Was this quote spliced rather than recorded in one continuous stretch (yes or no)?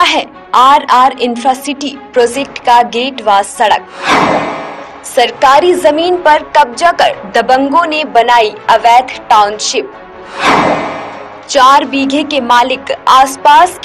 no